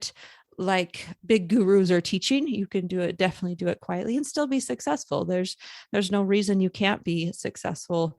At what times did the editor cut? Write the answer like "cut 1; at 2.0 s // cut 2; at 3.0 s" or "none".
cut 1; at 1.0 s